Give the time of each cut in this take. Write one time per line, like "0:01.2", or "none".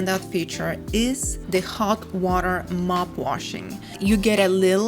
0:04.0